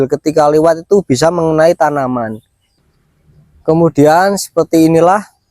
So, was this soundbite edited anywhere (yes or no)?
yes